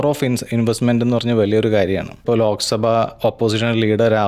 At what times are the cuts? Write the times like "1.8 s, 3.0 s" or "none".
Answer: 2.2 s